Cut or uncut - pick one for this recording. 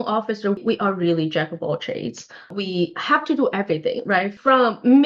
uncut